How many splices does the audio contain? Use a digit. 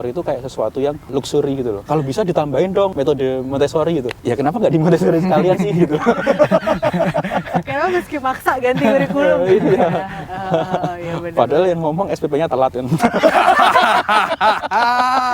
3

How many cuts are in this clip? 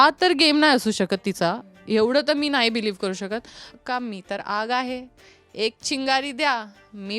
1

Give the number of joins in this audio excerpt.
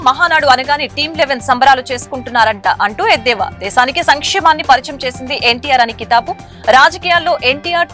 0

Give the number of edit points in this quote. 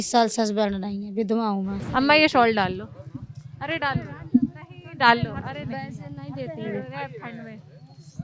1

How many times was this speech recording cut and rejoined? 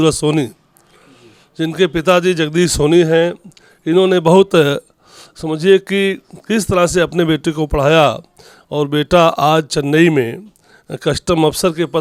0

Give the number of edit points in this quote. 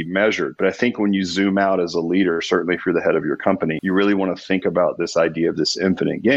0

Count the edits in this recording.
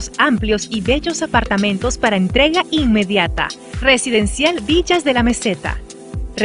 1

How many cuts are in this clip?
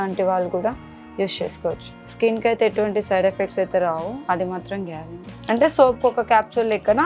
1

